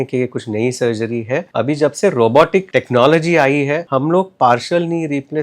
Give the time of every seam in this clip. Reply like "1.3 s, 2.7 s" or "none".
1.5 s, 2.7 s, 3.8 s